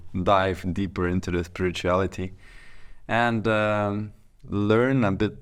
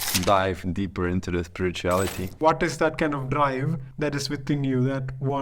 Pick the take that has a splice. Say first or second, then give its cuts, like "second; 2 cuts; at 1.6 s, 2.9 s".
second; 2 cuts; at 2.3 s, 3.8 s